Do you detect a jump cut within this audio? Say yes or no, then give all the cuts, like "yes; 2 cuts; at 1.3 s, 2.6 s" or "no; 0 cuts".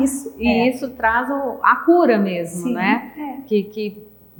no; 0 cuts